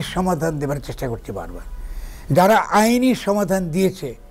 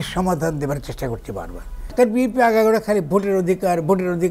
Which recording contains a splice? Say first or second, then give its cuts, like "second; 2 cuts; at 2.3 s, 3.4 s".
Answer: second; 1 cut; at 1.8 s